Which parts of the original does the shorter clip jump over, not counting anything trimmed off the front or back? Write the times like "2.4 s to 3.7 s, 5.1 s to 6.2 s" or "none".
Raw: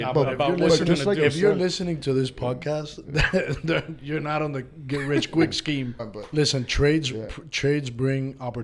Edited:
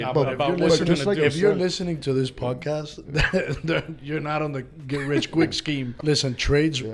5.9 s to 6.2 s